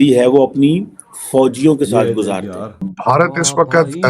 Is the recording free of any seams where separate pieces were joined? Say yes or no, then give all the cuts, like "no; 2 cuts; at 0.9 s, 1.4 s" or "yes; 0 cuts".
no; 1 cut; at 3.0 s